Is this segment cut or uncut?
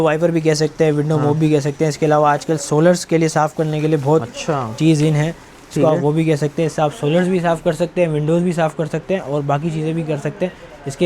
uncut